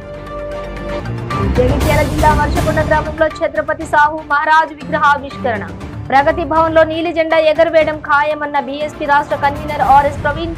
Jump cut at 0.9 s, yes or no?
yes